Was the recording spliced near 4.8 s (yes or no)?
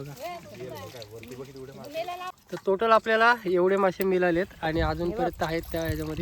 no